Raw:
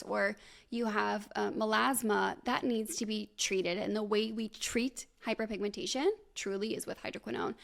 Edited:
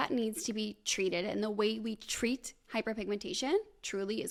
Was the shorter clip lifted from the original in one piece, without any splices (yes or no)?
yes